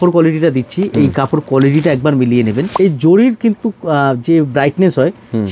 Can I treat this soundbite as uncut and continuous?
no; 1 cut; at 2.7 s

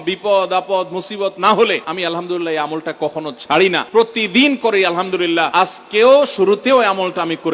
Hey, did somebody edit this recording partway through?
yes; 3 cuts; at 1.9 s, 3.8 s, 5.5 s

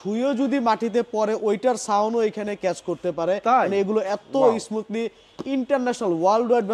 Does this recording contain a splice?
no; 0 cuts

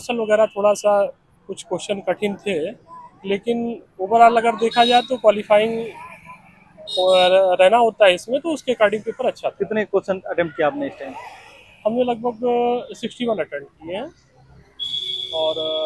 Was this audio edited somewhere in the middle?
no; 0 cuts

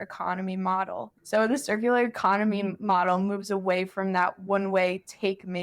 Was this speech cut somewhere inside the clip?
yes; 1 cut; at 1.1 s

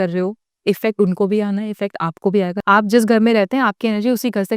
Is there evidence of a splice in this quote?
yes; 1 cut; at 2.6 s

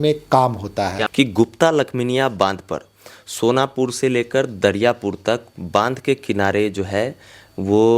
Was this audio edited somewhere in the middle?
yes; 1 cut; at 1.0 s

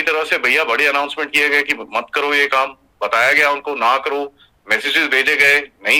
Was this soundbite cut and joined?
no; 0 cuts

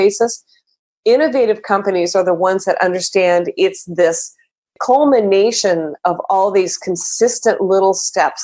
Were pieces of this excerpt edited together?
yes; 1 cut; at 4.8 s

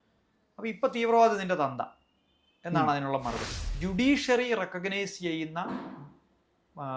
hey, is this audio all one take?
no; 1 cut; at 3.7 s

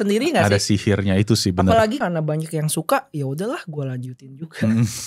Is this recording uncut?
no; 1 cut; at 2.0 s

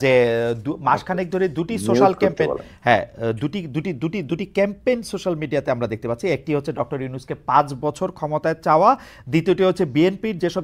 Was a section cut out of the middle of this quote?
no; 0 cuts

